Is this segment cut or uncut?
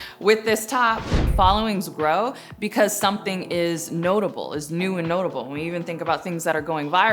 cut